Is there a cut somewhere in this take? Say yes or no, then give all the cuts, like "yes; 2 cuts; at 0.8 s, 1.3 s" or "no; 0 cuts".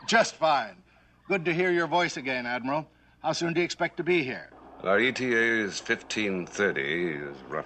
yes; 1 cut; at 6.7 s